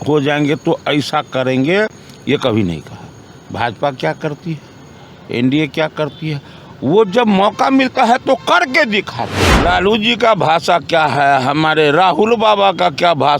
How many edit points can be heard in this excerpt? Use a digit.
1